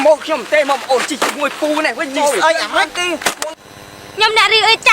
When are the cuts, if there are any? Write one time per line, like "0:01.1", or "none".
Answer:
0:03.6